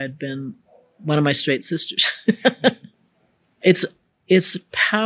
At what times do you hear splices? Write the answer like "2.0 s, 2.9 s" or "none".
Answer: 2.9 s